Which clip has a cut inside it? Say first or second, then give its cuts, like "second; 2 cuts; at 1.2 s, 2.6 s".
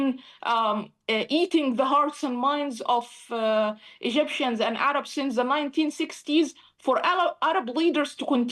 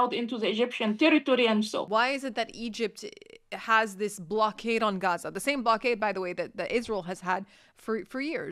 second; 1 cut; at 1.9 s